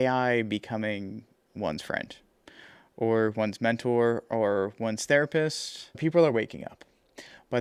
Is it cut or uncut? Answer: cut